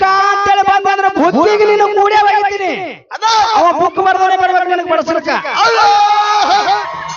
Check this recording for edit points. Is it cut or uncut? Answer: cut